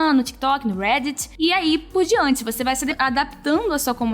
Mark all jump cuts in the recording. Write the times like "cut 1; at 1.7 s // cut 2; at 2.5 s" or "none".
cut 1; at 3.0 s